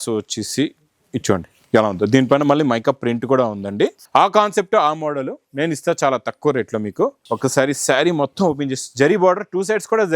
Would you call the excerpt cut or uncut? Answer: cut